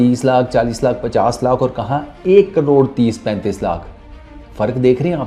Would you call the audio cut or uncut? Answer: uncut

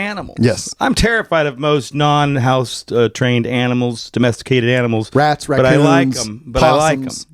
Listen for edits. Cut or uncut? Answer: uncut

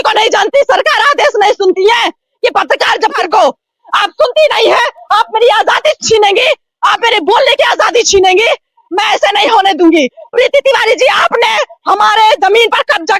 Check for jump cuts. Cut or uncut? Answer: cut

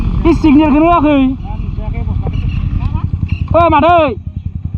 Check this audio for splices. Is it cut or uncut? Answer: uncut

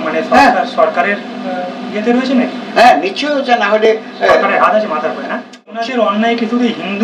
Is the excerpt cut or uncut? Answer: cut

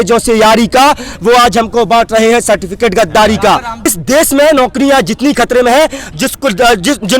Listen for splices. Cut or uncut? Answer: cut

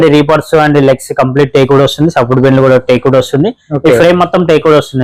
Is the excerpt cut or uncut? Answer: uncut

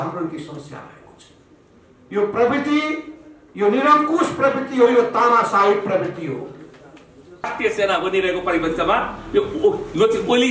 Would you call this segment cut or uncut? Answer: cut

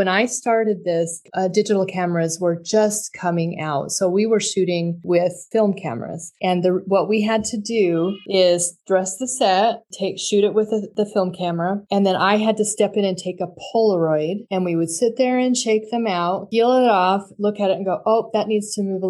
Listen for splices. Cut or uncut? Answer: uncut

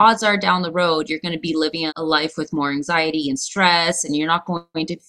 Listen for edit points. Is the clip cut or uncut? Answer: uncut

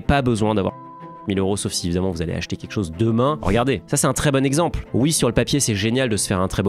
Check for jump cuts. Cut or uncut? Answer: cut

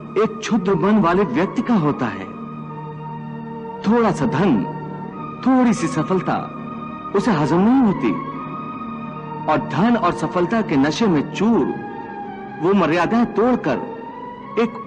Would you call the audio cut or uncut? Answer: uncut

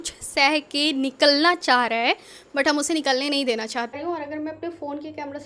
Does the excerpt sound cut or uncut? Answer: cut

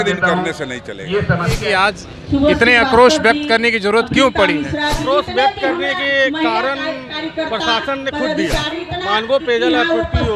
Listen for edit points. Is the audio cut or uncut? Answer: cut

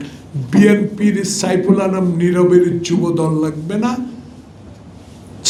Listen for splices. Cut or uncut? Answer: uncut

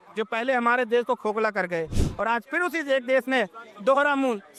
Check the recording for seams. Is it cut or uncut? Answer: uncut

